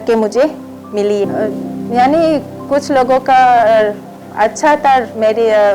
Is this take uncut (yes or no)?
no